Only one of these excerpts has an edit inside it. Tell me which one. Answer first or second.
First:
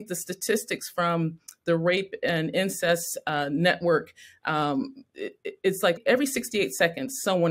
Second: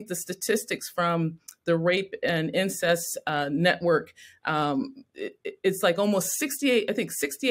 first